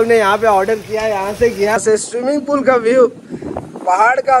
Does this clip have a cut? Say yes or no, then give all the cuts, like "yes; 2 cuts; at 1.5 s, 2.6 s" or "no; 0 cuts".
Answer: yes; 1 cut; at 1.8 s